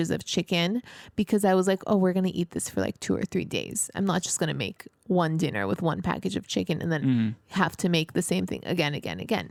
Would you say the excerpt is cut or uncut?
uncut